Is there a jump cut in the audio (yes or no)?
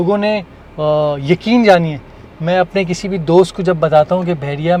no